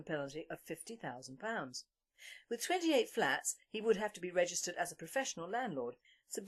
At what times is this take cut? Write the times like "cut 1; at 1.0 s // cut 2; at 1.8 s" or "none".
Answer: none